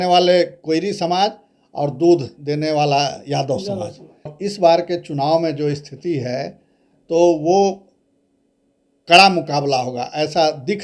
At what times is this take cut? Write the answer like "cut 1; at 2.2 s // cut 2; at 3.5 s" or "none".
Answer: cut 1; at 4.3 s